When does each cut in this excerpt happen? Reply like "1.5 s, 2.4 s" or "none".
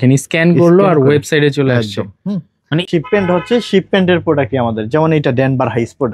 2.8 s